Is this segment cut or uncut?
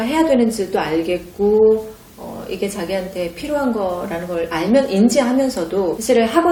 uncut